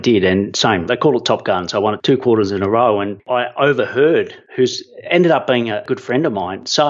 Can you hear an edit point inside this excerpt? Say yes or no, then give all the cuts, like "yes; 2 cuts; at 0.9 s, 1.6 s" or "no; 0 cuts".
yes; 5 cuts; at 0.8 s, 2.0 s, 3.2 s, 4.4 s, 5.8 s